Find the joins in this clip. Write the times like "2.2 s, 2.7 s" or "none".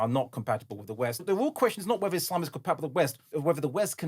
1.2 s, 3.2 s